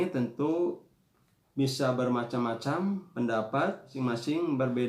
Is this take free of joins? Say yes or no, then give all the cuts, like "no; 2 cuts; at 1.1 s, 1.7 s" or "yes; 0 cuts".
no; 1 cut; at 3.9 s